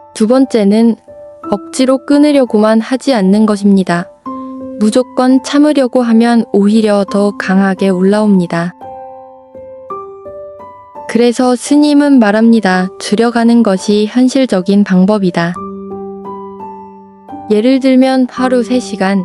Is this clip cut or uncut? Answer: uncut